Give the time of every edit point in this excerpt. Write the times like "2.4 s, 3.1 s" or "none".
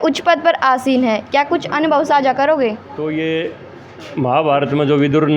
2.9 s